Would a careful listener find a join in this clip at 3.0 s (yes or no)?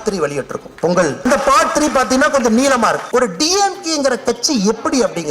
yes